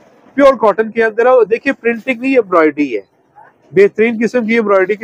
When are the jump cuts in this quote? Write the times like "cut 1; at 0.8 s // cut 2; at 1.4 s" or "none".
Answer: none